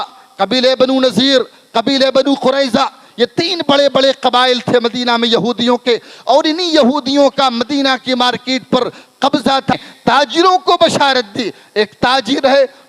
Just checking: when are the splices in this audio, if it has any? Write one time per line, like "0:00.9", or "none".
0:09.7